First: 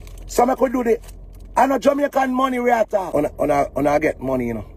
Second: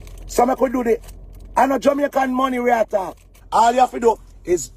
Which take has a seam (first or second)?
second